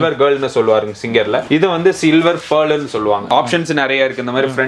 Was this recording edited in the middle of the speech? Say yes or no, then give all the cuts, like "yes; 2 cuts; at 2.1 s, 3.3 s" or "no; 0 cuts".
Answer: yes; 2 cuts; at 1.4 s, 3.2 s